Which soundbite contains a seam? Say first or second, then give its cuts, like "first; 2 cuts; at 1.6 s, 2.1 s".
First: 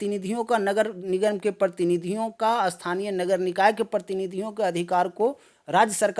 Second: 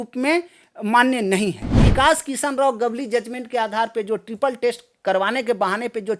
second; 1 cut; at 1.8 s